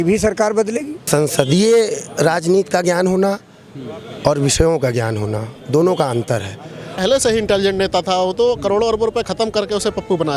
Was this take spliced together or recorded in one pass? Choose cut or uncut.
cut